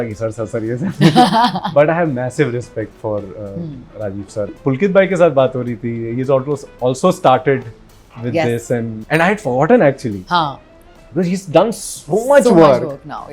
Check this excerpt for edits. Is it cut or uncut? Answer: cut